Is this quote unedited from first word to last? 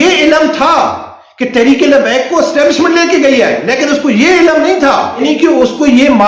no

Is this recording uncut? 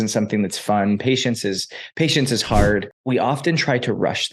no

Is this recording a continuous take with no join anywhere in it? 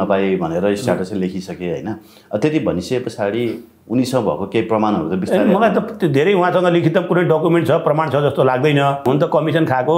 no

